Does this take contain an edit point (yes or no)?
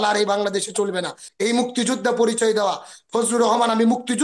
yes